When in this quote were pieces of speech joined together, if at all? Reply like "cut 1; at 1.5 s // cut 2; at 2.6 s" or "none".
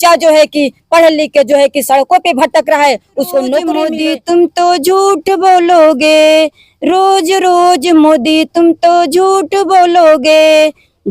cut 1; at 3.8 s